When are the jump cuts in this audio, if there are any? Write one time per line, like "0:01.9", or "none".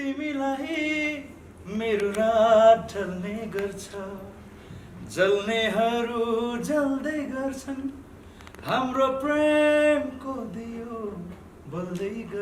none